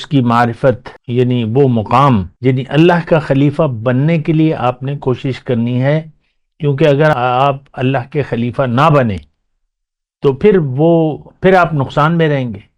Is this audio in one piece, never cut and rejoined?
no; 3 cuts; at 0.9 s, 2.3 s, 7.1 s

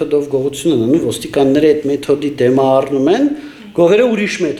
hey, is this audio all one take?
yes; 0 cuts

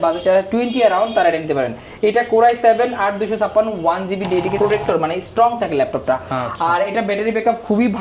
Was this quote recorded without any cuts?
no; 1 cut; at 4.5 s

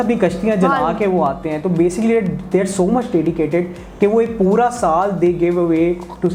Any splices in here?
no; 0 cuts

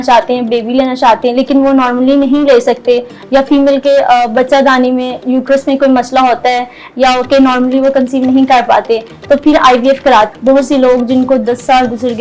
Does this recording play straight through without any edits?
no; 1 cut; at 10.3 s

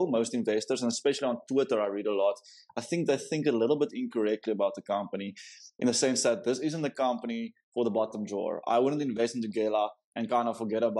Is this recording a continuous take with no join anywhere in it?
yes; 0 cuts

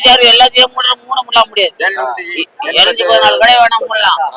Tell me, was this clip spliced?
no; 0 cuts

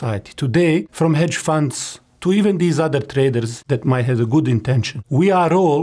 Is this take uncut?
no; 3 cuts; at 0.9 s, 3.5 s, 4.9 s

